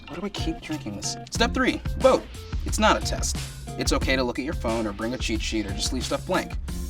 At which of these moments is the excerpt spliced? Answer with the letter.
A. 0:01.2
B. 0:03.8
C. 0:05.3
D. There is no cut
A